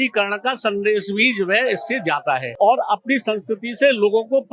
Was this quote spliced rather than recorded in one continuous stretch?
yes; 1 cut; at 2.5 s

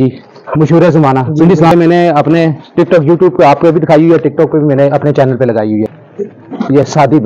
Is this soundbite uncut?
no; 2 cuts; at 1.7 s, 5.9 s

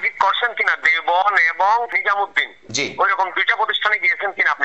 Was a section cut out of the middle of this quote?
yes; 1 cut; at 2.0 s

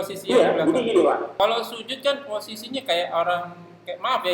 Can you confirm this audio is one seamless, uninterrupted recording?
no; 1 cut; at 1.4 s

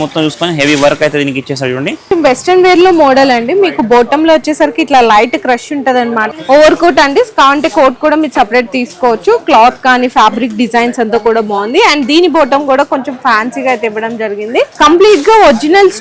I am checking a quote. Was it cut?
yes; 3 cuts; at 2.1 s, 6.3 s, 14.7 s

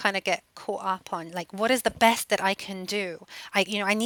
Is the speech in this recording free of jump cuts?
yes; 0 cuts

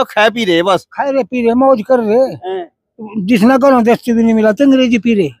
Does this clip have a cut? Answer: no; 0 cuts

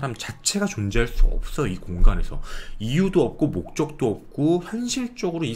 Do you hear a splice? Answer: no; 0 cuts

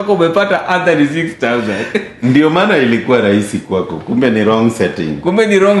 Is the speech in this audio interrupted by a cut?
no; 0 cuts

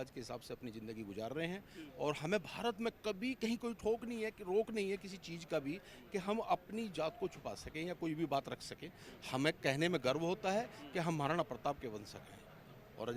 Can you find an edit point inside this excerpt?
no; 0 cuts

